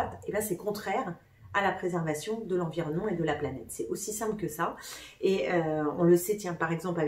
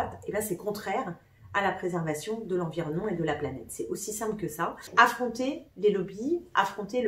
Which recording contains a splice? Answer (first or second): second